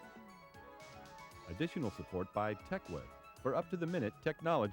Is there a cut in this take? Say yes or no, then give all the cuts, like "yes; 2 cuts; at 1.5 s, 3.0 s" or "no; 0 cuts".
yes; 1 cut; at 1.4 s